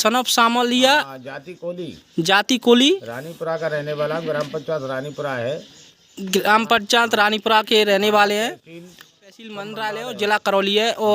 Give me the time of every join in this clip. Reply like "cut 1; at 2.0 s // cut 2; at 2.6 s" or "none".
cut 1; at 9.6 s